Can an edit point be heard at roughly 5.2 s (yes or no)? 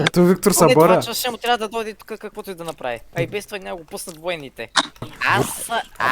yes